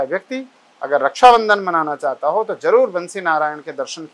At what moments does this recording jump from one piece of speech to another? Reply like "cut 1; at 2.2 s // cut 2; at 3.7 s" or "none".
none